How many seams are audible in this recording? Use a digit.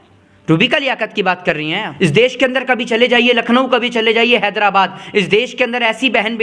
1